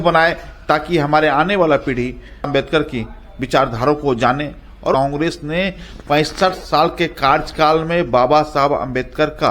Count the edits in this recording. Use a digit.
2